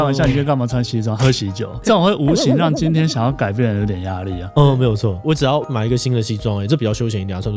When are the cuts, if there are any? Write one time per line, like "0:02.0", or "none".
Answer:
0:01.8